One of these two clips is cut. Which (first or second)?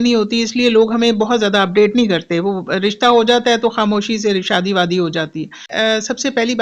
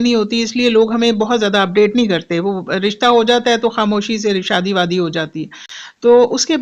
first